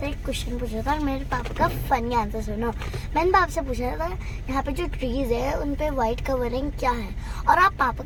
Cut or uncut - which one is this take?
uncut